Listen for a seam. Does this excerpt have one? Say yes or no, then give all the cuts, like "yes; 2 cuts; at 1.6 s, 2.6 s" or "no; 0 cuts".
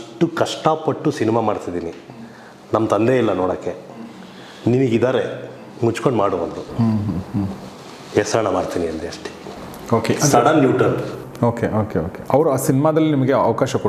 no; 0 cuts